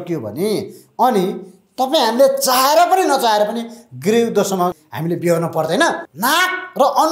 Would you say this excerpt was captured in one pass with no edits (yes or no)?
no